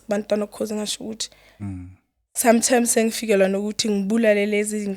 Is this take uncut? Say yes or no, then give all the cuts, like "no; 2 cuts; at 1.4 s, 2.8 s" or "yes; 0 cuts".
yes; 0 cuts